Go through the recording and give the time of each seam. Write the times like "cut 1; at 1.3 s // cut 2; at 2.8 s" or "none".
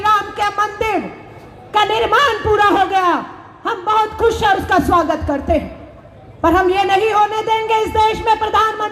none

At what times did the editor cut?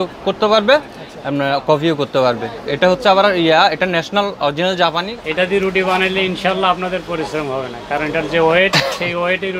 cut 1; at 5.2 s

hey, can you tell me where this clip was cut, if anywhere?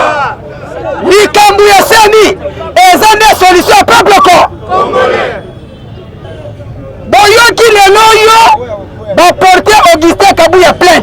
cut 1; at 6.3 s

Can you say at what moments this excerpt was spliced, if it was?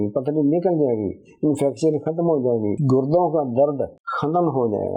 cut 1; at 4.0 s

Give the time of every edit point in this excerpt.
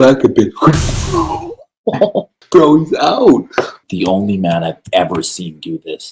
cut 1; at 2.3 s // cut 2; at 3.8 s

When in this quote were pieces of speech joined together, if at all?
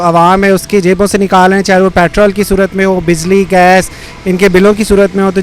none

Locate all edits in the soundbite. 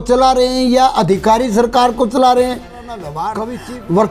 cut 1; at 3.2 s

